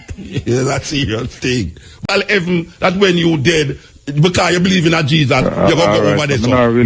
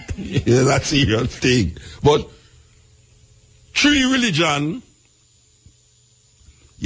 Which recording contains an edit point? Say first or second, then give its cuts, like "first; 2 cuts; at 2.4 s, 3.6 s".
first; 1 cut; at 2.0 s